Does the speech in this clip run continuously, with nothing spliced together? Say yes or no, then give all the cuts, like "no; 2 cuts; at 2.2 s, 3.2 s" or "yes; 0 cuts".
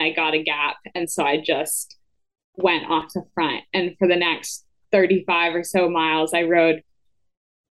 yes; 0 cuts